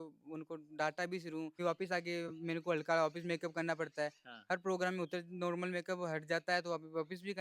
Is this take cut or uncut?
cut